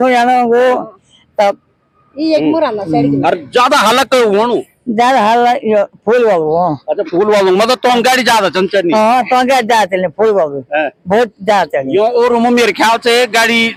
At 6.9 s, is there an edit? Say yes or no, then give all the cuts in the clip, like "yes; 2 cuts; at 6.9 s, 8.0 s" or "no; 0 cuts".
no; 0 cuts